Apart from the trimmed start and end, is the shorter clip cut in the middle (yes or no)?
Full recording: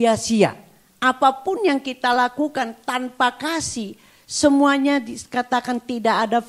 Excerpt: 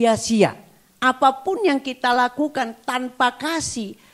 no